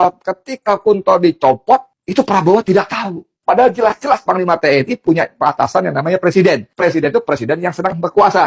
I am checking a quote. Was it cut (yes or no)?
yes